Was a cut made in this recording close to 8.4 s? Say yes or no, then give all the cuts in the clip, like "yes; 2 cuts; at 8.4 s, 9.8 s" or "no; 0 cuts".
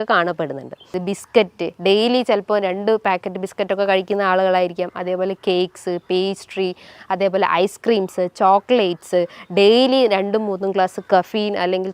no; 1 cut; at 1.0 s